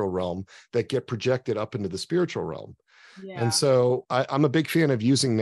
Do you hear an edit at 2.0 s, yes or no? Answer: no